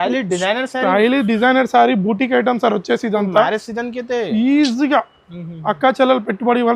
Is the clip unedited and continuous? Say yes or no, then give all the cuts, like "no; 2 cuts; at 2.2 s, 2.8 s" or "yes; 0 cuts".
yes; 0 cuts